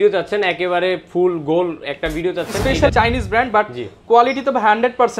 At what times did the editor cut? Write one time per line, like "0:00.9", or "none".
0:02.9

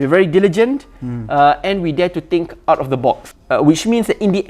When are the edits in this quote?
0:03.3

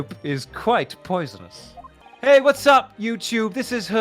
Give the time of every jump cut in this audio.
0:02.0

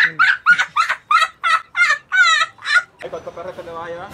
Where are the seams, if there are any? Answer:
0:03.0

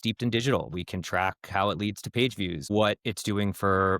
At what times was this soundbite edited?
0:02.7

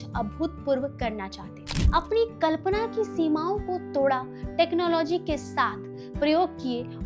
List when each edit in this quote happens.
0:01.8

